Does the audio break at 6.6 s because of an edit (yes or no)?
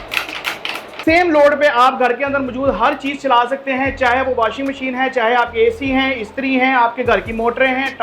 no